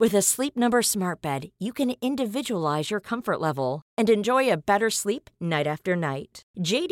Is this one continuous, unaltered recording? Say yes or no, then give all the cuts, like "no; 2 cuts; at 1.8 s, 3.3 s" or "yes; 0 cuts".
yes; 0 cuts